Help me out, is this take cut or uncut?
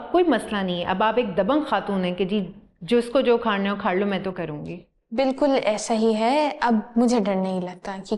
uncut